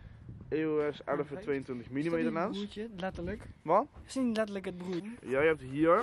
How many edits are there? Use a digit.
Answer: 0